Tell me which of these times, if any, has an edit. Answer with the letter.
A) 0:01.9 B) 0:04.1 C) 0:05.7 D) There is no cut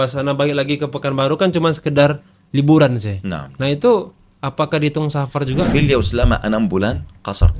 C